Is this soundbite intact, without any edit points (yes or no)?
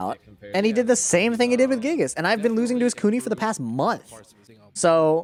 yes